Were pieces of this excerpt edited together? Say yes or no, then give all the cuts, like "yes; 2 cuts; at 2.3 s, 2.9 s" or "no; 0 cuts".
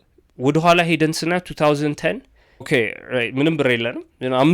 yes; 1 cut; at 2.7 s